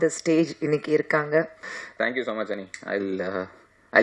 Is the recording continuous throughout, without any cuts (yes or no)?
no